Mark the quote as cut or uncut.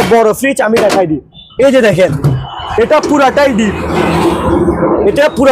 uncut